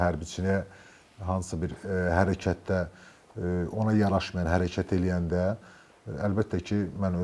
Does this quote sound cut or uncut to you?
uncut